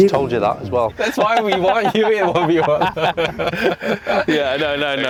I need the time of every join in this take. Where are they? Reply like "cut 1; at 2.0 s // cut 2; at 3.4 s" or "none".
none